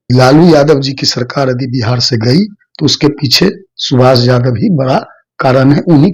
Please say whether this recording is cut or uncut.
uncut